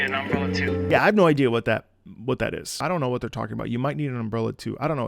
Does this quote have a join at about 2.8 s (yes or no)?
yes